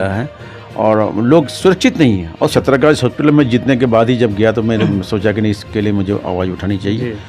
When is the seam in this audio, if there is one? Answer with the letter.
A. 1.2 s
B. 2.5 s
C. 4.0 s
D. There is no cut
B